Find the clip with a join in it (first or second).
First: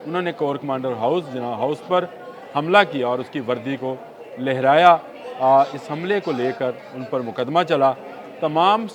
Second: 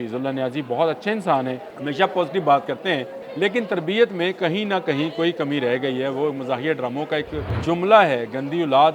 second